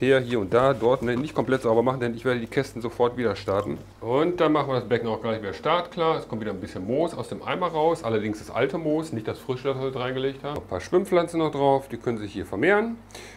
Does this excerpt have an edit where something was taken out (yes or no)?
yes